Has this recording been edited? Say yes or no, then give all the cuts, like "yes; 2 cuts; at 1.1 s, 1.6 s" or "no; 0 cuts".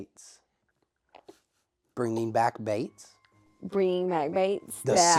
no; 0 cuts